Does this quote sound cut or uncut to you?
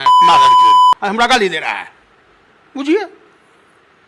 uncut